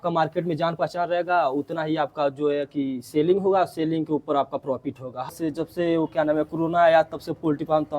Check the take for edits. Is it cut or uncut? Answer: cut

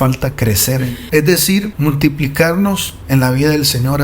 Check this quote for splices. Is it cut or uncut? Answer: cut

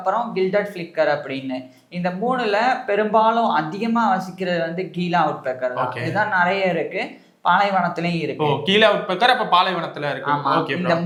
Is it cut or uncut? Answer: uncut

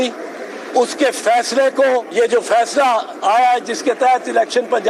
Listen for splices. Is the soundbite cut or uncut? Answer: cut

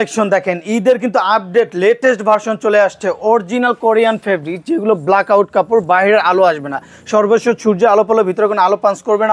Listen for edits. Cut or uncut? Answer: uncut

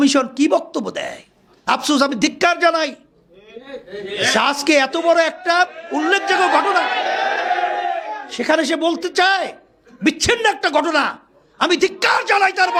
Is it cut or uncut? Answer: uncut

